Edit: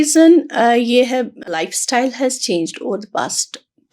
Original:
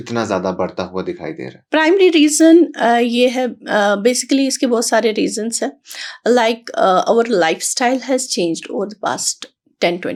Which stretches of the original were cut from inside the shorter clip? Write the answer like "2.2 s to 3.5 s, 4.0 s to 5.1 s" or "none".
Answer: 3.7 s to 7.4 s